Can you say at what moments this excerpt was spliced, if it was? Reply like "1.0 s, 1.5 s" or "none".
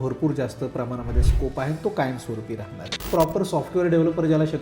3.1 s